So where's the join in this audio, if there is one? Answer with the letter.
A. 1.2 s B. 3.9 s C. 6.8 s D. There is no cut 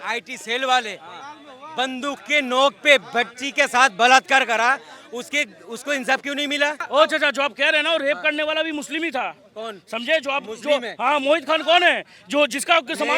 C